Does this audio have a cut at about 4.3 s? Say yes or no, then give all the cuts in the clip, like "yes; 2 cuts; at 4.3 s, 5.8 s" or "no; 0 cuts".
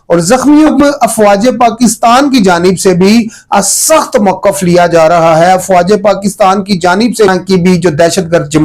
no; 2 cuts; at 0.7 s, 7.3 s